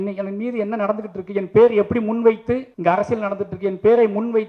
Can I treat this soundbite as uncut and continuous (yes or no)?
no